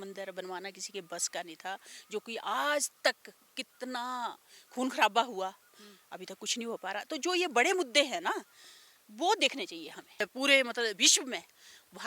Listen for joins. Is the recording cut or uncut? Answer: cut